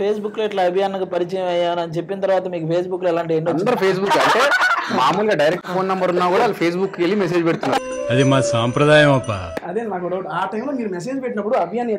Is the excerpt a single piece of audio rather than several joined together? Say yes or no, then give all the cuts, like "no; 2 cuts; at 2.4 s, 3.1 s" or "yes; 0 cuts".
no; 1 cut; at 7.9 s